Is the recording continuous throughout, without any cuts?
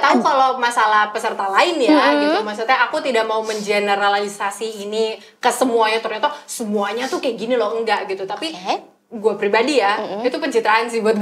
yes; 0 cuts

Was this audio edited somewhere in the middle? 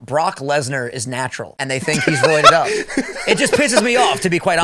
yes; 1 cut; at 1.5 s

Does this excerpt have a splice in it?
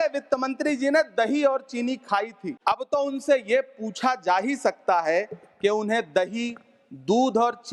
yes; 1 cut; at 2.5 s

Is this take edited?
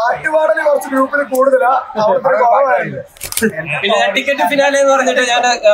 yes; 1 cut; at 3.3 s

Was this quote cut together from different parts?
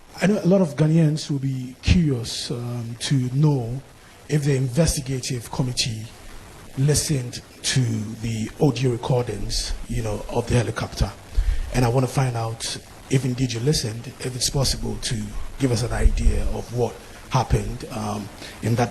no; 0 cuts

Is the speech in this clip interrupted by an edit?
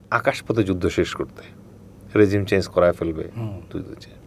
no; 0 cuts

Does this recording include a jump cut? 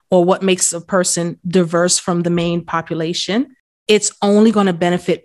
yes; 1 cut; at 3.7 s

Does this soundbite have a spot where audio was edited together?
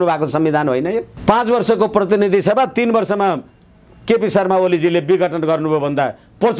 yes; 1 cut; at 1.1 s

